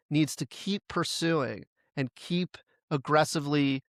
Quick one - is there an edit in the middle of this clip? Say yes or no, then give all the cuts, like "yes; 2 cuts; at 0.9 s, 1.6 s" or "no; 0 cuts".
no; 0 cuts